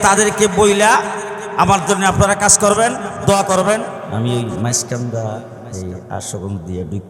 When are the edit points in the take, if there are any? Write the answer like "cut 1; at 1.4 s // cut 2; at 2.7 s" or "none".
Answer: cut 1; at 3.9 s